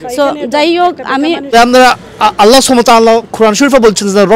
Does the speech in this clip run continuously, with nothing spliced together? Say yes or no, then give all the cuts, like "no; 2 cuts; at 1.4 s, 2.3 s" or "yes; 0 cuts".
no; 1 cut; at 1.5 s